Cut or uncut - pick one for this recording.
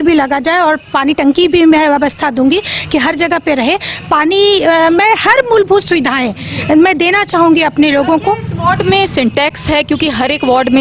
uncut